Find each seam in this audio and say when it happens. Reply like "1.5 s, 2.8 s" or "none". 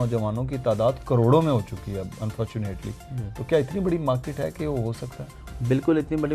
none